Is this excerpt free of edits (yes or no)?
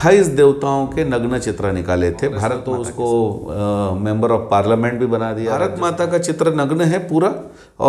no